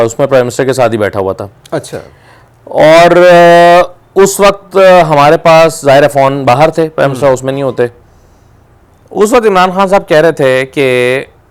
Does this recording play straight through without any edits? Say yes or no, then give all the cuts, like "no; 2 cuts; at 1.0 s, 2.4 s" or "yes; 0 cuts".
yes; 0 cuts